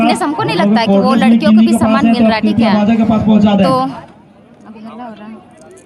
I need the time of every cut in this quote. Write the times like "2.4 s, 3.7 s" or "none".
none